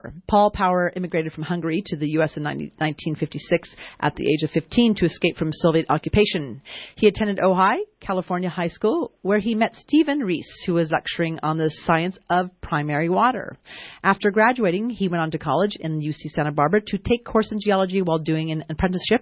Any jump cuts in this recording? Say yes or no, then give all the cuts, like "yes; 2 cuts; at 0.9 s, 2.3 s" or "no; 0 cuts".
no; 0 cuts